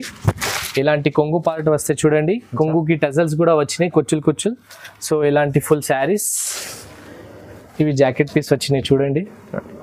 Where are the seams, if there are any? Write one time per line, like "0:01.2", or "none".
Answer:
none